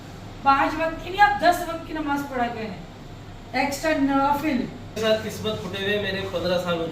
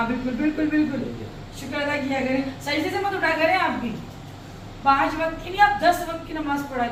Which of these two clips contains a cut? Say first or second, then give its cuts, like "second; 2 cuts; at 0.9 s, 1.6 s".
first; 1 cut; at 5.0 s